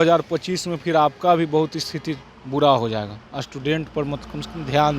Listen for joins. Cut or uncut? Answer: uncut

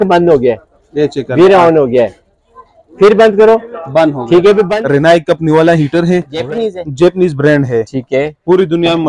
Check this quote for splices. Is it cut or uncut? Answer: cut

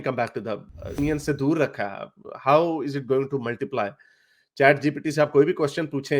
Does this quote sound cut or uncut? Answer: cut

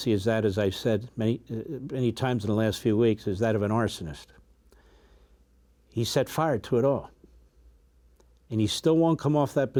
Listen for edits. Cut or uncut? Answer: uncut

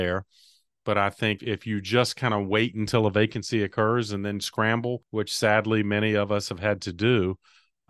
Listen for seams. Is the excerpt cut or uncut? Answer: cut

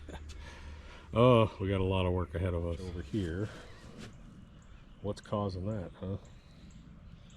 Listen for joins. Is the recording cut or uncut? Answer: cut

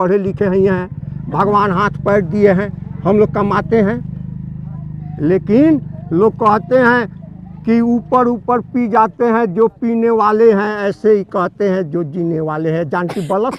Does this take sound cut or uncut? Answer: uncut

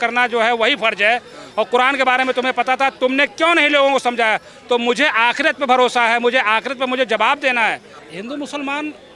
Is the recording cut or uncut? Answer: cut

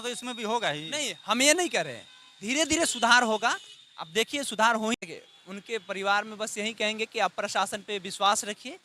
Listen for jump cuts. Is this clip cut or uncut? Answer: cut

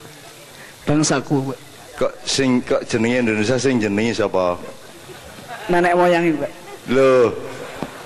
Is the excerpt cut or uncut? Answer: uncut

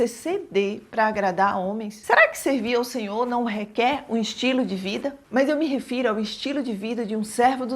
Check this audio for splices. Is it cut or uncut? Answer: cut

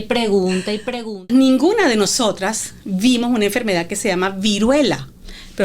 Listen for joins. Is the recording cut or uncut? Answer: cut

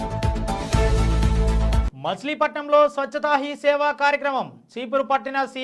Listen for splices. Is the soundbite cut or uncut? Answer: uncut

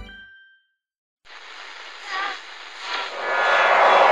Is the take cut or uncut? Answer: cut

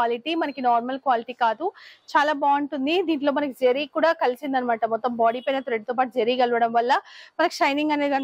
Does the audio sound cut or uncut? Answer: uncut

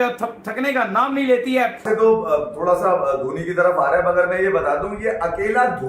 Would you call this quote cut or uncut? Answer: cut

